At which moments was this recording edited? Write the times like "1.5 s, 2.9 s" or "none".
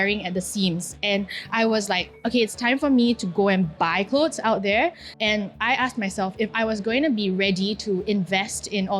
5.1 s